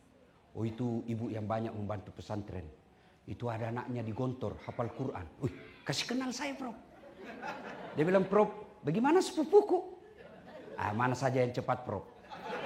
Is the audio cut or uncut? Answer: uncut